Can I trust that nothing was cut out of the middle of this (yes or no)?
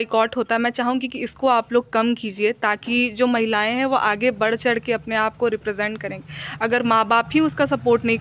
yes